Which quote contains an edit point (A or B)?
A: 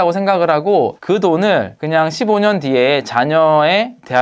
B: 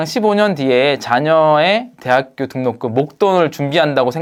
A